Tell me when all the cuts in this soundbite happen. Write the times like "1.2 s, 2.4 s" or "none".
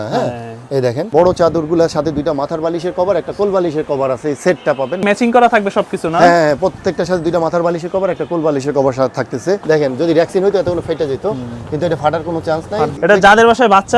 1.1 s, 5.0 s, 9.6 s, 12.9 s